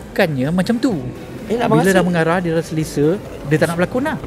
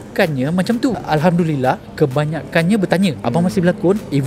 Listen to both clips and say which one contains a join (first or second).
second